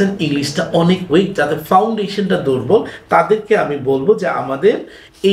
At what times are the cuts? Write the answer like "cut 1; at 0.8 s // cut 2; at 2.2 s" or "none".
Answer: none